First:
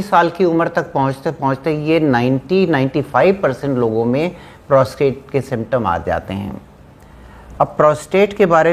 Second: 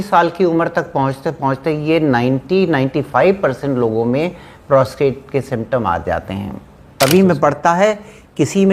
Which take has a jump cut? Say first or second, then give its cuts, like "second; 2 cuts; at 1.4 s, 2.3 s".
second; 1 cut; at 6.9 s